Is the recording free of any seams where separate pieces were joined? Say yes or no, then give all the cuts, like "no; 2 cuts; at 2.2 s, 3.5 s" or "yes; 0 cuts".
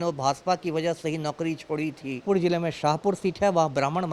no; 1 cut; at 2.2 s